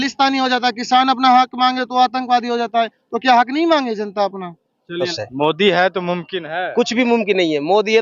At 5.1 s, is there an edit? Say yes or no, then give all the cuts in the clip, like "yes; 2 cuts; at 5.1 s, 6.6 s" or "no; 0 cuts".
yes; 1 cut; at 5.1 s